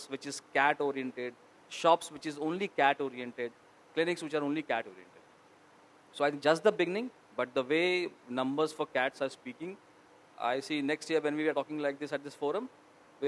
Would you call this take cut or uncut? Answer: uncut